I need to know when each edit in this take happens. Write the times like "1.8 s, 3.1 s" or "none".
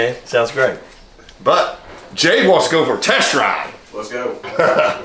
none